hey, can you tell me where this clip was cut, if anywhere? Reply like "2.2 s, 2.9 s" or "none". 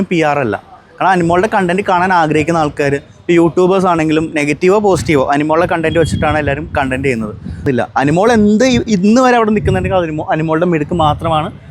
7.7 s

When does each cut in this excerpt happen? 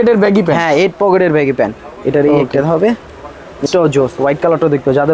3.6 s

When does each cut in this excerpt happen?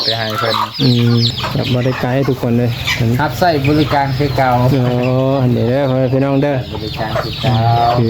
1.4 s

